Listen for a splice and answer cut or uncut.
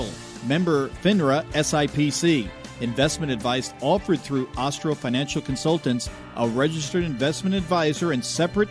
uncut